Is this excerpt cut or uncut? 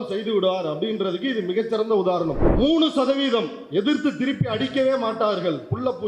cut